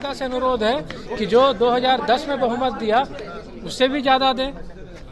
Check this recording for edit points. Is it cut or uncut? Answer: uncut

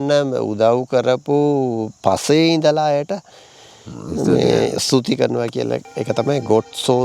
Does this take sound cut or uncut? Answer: uncut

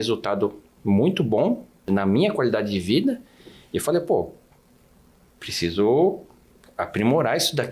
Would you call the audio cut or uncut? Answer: cut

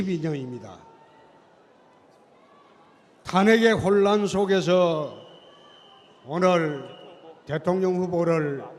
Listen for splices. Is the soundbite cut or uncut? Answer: uncut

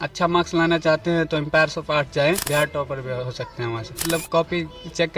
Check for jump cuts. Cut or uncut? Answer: cut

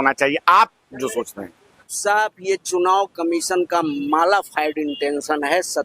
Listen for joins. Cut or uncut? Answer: cut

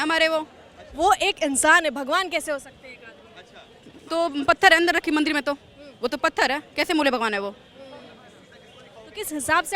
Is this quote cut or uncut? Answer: uncut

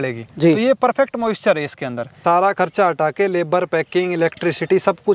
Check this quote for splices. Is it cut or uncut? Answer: cut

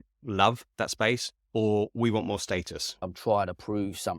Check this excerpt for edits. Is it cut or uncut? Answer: cut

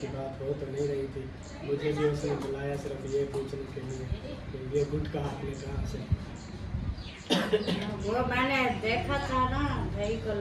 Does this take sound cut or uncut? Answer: uncut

